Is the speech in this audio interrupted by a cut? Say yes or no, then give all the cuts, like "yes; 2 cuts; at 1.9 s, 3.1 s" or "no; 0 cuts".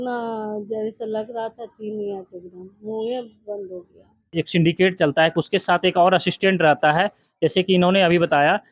yes; 1 cut; at 4.3 s